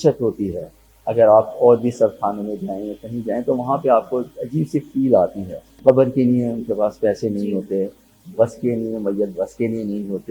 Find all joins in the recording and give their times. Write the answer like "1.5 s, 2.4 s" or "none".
5.6 s